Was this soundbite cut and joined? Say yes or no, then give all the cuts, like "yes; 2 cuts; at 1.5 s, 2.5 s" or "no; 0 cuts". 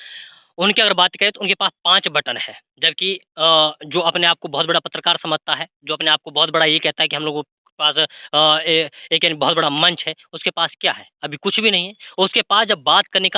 no; 0 cuts